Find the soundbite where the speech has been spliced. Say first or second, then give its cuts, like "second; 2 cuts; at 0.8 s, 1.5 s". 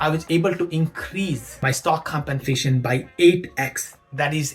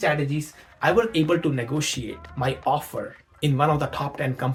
first; 1 cut; at 1.5 s